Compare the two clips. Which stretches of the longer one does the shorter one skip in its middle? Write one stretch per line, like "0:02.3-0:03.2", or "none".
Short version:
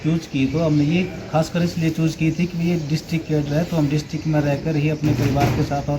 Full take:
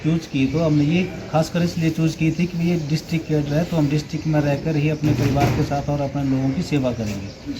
none